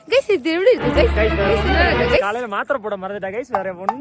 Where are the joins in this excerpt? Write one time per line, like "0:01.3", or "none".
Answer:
none